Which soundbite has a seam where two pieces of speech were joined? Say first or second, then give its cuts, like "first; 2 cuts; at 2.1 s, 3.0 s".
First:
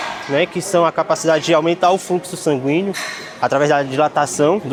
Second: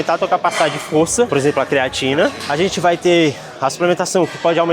second; 2 cuts; at 1.3 s, 2.4 s